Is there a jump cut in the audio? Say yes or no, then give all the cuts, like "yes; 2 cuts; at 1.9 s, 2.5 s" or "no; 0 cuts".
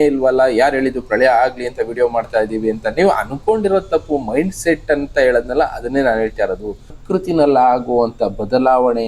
yes; 1 cut; at 7.0 s